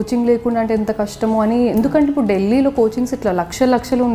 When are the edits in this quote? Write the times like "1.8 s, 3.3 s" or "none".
none